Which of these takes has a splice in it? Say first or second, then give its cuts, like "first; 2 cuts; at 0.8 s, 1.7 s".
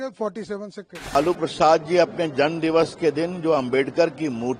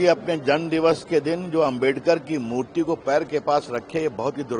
first; 1 cut; at 1.0 s